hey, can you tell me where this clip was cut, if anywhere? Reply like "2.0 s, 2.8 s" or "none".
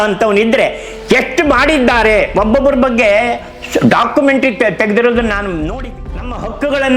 5.8 s